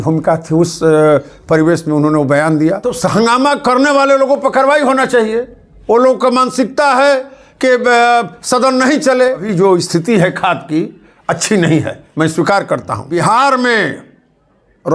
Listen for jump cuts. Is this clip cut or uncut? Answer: cut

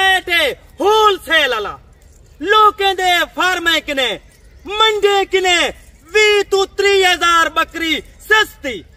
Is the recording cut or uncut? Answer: uncut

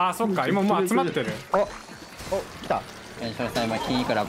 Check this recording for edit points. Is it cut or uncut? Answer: cut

